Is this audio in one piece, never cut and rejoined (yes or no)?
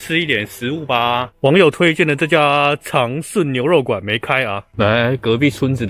no